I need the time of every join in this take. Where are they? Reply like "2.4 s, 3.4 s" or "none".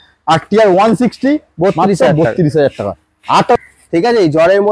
3.6 s